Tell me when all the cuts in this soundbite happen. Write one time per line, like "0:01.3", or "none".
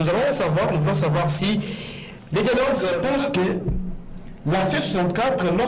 0:03.0